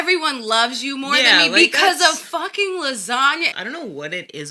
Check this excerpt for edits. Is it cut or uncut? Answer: cut